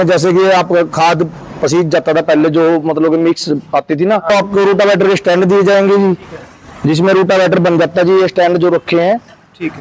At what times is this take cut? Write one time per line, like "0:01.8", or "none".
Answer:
0:04.3

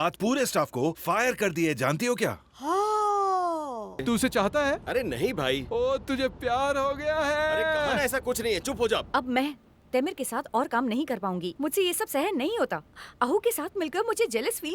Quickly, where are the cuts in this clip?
0:04.0
0:09.1

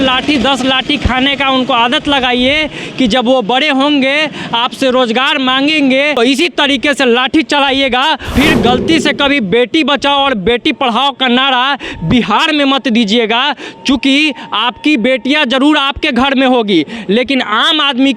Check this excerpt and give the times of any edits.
0:06.2
0:08.3

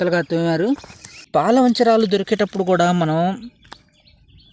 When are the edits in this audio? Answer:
0:01.5

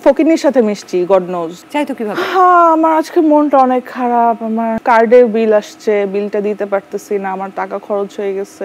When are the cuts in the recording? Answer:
0:01.5
0:04.8

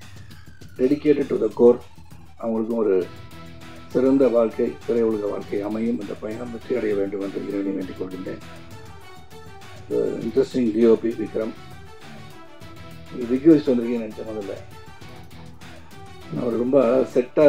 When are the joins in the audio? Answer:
none

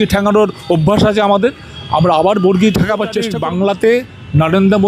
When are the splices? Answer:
0:03.3

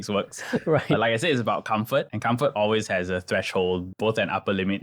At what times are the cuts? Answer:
0:02.1
0:03.9

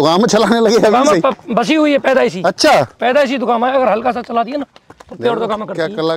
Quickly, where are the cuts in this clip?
none

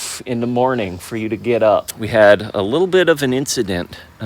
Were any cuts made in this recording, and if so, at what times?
0:02.0

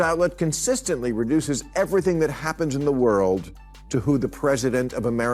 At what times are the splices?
none

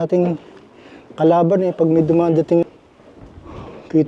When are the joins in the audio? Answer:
0:02.6

